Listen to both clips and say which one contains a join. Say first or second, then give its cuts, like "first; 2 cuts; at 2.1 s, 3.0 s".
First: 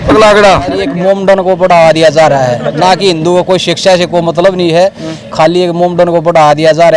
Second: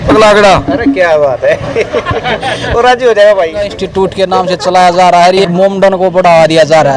first; 1 cut; at 0.9 s